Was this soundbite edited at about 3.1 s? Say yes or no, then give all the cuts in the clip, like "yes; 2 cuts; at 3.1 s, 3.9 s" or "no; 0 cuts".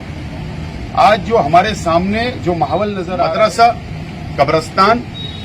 yes; 1 cut; at 3.1 s